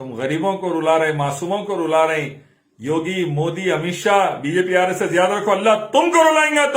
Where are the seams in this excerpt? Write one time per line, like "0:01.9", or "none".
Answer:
none